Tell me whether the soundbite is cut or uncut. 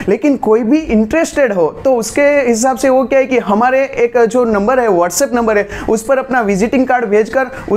uncut